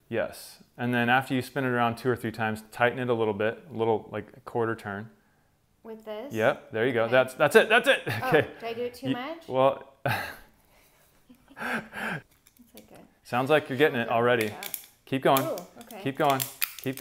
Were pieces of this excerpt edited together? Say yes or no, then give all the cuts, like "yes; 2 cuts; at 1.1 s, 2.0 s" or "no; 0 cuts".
yes; 2 cuts; at 10.0 s, 12.2 s